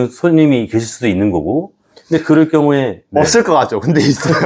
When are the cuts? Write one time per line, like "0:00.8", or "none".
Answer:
none